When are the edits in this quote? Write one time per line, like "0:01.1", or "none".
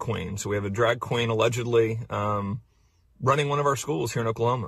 0:02.7

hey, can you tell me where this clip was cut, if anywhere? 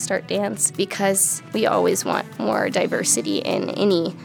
0:01.1
0:02.3

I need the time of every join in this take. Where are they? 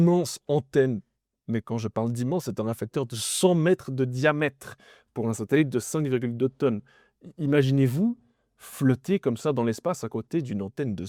none

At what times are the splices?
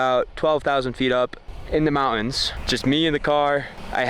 0:02.5

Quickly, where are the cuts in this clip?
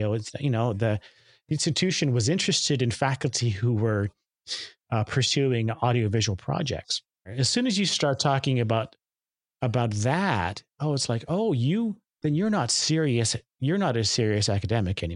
0:07.3

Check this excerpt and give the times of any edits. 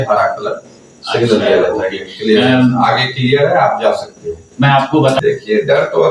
0:05.2

